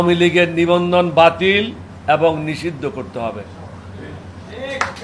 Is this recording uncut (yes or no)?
yes